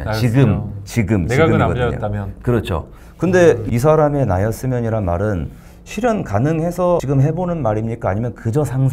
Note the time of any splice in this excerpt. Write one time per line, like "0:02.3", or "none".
0:03.6
0:07.0